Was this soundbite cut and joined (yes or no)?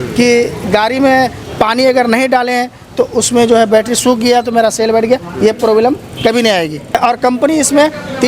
yes